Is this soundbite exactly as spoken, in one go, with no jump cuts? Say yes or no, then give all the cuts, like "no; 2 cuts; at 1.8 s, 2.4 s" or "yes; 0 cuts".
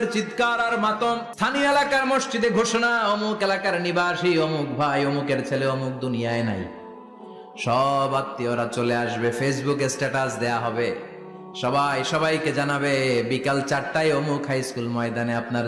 no; 1 cut; at 1.3 s